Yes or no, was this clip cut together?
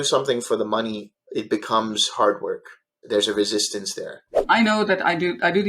yes